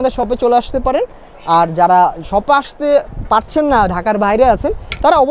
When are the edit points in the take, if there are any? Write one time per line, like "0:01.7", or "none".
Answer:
none